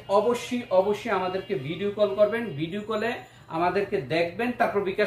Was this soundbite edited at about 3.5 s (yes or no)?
no